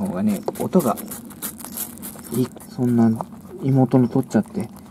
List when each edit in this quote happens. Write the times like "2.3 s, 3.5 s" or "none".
2.5 s